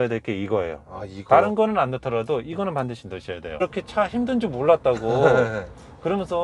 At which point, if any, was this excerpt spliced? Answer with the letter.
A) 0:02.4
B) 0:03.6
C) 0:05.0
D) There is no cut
B